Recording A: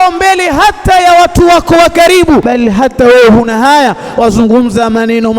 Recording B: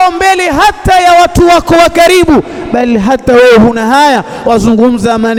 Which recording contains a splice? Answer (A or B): A